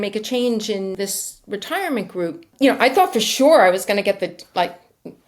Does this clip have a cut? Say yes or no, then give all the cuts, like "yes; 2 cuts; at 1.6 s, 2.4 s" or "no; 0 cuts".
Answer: yes; 2 cuts; at 0.9 s, 2.5 s